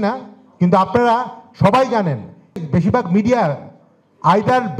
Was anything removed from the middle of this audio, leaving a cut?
yes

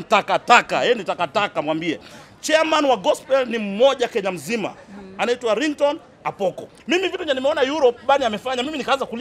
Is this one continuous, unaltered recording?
no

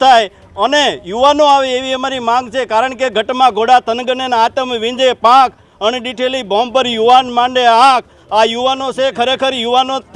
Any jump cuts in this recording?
no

